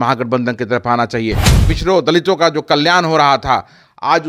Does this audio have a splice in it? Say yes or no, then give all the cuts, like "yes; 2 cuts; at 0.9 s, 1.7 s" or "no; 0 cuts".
yes; 1 cut; at 1.5 s